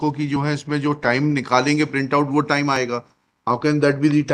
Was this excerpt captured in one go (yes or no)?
yes